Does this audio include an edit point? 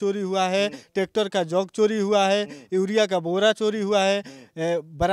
no; 0 cuts

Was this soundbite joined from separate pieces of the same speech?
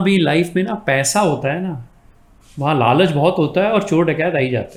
no; 0 cuts

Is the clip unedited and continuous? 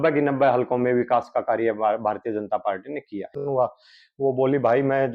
no; 1 cut; at 3.4 s

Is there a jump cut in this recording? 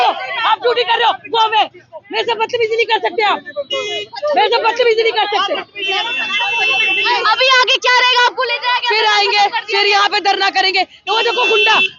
no; 0 cuts

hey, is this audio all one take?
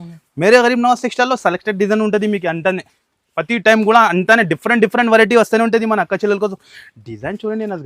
yes; 0 cuts

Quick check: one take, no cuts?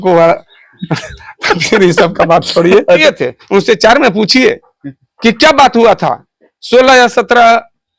no; 1 cut; at 3.0 s

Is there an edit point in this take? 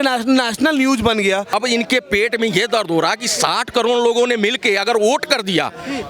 yes; 1 cut; at 1.5 s

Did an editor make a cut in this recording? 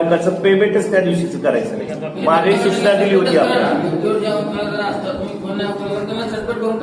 no; 0 cuts

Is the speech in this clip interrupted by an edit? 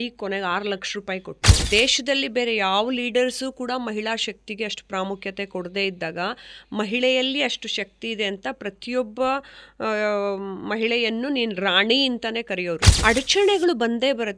yes; 2 cuts; at 1.7 s, 12.9 s

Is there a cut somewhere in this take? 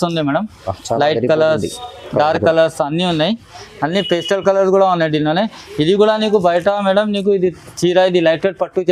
no; 0 cuts

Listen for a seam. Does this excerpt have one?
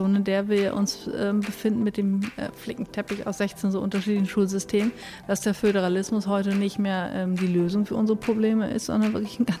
no; 0 cuts

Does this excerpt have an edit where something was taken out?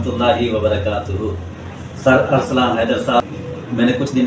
yes; 1 cut; at 3.2 s

